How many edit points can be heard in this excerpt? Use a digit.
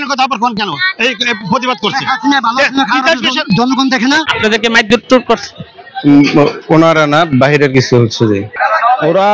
2